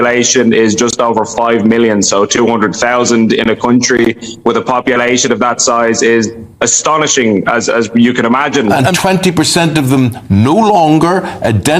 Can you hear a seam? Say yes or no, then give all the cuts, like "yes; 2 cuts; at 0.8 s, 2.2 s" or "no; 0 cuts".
yes; 1 cut; at 8.6 s